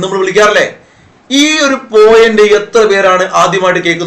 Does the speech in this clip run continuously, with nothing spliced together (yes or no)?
yes